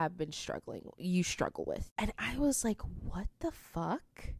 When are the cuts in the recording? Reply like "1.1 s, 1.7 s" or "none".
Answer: 1.9 s